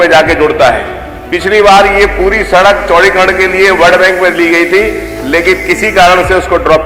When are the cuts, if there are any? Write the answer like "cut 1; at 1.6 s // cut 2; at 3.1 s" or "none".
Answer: none